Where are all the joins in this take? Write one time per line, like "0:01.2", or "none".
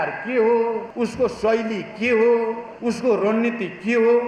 0:00.9
0:02.7